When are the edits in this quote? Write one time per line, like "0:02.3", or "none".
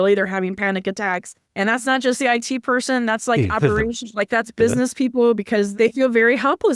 0:01.4
0:05.7

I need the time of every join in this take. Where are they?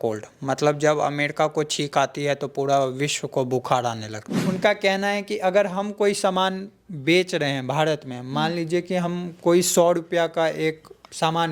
0:04.4

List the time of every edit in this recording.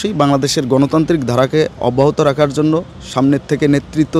none

